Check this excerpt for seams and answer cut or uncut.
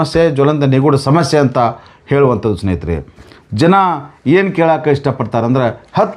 uncut